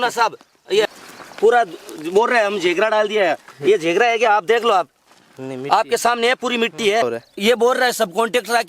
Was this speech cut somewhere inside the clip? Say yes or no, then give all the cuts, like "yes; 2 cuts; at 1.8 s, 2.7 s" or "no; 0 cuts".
yes; 2 cuts; at 0.9 s, 7.0 s